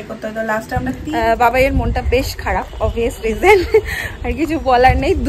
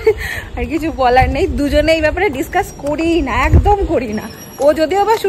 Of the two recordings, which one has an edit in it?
first; 1 cut; at 1.0 s

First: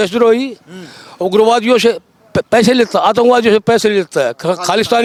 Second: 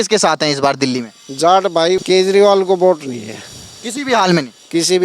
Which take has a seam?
second; 1 cut; at 2.0 s

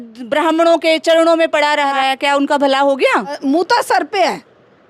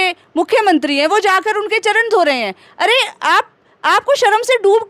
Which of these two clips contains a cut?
first; 2 cuts; at 1.9 s, 3.4 s

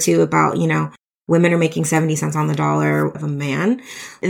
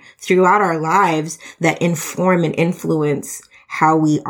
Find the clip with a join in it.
first; 1 cut; at 3.2 s

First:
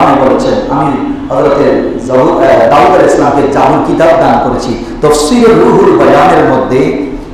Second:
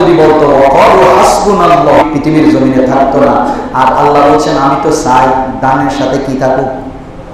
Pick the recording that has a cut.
second; 1 cut; at 2.0 s

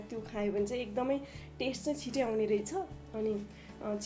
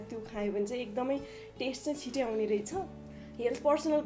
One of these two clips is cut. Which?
second; 1 cut; at 3.0 s

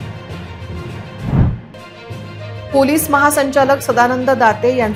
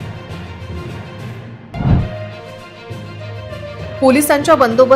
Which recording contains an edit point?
second; 1 cut; at 1.0 s

